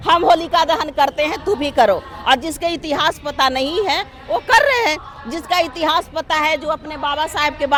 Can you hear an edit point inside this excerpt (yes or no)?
no